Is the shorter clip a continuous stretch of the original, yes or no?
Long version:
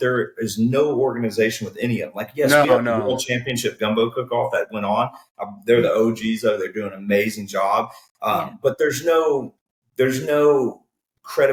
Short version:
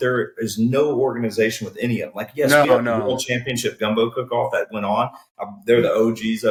yes